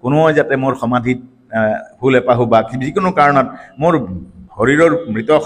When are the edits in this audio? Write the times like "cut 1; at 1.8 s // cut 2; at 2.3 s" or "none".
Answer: none